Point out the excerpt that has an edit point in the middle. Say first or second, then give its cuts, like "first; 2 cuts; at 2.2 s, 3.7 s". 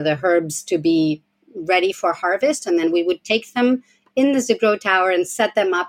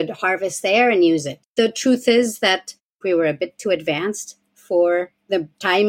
second; 2 cuts; at 1.4 s, 3.0 s